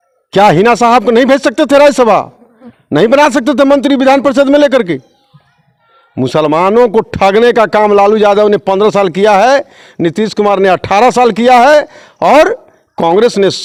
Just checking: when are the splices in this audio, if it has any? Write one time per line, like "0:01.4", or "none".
none